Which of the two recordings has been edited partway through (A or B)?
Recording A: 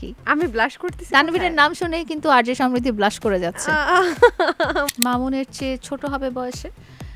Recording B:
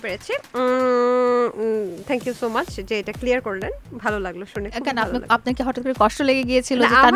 A